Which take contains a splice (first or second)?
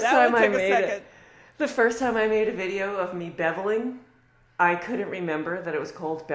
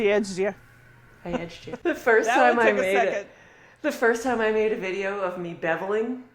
second